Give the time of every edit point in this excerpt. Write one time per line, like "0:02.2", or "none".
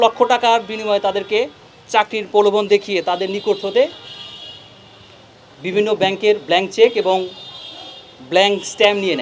none